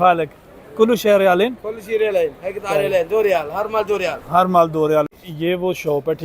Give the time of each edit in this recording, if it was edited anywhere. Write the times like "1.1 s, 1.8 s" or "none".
5.2 s